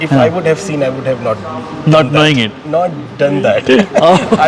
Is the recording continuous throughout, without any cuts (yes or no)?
yes